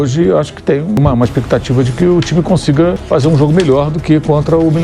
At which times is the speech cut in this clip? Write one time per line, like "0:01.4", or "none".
0:01.0
0:03.0